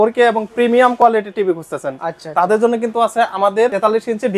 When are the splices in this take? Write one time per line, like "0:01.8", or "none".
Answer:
none